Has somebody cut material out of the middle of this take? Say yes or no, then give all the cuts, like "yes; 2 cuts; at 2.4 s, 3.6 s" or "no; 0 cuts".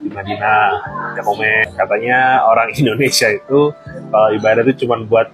no; 0 cuts